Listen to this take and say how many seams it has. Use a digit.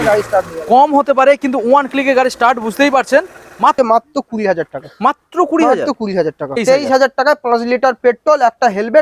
2